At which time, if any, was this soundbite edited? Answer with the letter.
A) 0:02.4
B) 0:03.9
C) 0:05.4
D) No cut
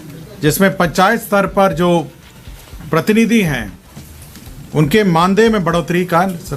D